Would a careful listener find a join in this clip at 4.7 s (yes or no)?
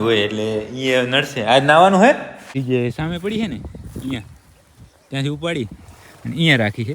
no